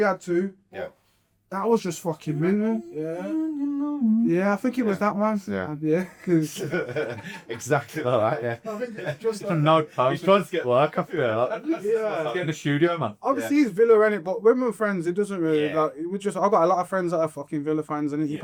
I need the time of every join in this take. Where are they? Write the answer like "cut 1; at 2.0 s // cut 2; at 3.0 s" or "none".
none

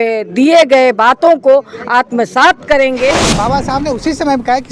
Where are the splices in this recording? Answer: cut 1; at 3.2 s

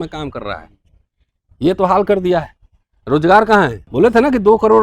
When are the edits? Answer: cut 1; at 3.8 s

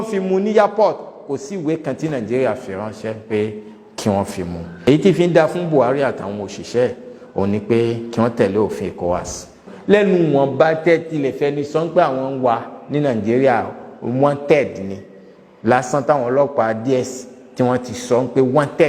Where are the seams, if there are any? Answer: cut 1; at 4.7 s // cut 2; at 9.7 s

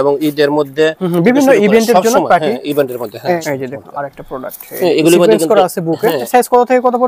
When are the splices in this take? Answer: cut 1; at 3.4 s // cut 2; at 6.2 s

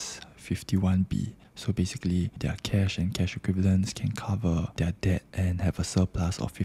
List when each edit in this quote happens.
cut 1; at 2.4 s // cut 2; at 4.9 s

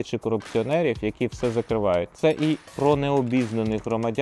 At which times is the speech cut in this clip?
cut 1; at 2.1 s

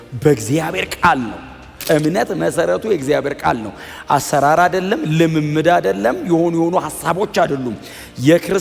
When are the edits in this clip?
cut 1; at 1.7 s

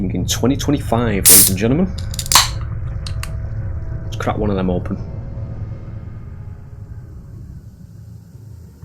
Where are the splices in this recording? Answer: none

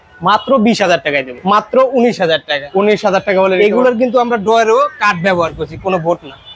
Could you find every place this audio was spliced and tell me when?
cut 1; at 1.3 s

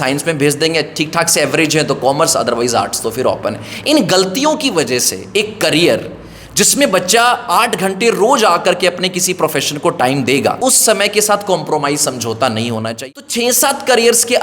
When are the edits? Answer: cut 1; at 10.6 s // cut 2; at 12.9 s

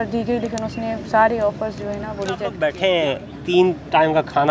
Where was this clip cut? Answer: cut 1; at 2.5 s

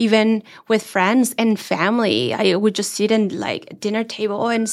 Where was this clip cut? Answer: none

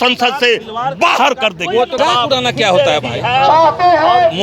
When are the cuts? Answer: cut 1; at 2.0 s

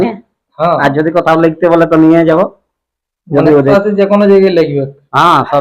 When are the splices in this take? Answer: cut 1; at 3.7 s

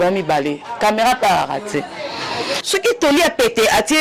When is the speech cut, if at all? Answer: cut 1; at 2.6 s

